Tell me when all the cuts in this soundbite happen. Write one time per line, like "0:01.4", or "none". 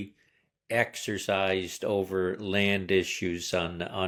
none